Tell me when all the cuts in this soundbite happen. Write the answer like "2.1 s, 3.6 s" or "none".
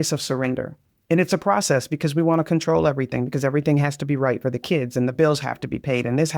0.9 s